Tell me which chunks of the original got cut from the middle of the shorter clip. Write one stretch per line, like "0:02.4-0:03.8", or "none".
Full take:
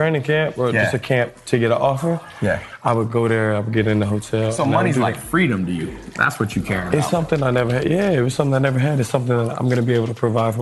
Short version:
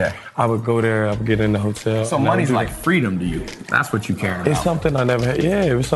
none

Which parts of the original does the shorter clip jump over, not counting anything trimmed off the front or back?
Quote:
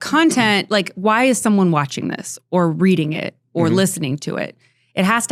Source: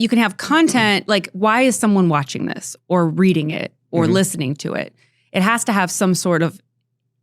none

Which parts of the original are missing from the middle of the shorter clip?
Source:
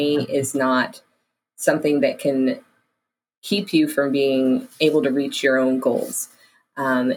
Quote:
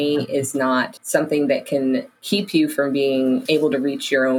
0:01.0-0:01.5
0:02.7-0:03.3
0:04.6-0:04.7

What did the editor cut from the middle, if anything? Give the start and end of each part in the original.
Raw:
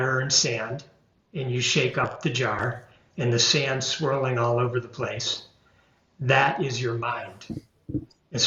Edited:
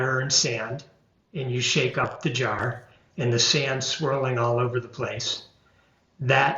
none

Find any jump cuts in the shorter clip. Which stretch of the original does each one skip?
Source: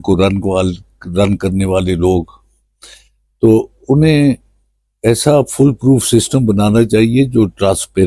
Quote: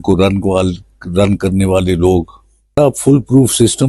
0:02.8-0:05.3

